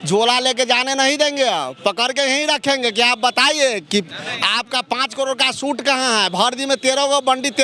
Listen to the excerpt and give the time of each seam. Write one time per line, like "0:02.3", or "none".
none